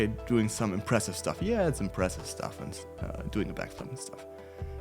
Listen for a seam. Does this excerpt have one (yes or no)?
no